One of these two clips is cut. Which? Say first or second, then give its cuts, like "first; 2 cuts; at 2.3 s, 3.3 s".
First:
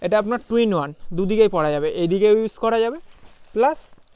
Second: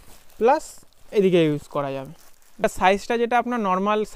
second; 1 cut; at 2.6 s